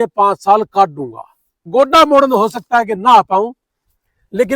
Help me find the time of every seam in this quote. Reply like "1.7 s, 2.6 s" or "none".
1.7 s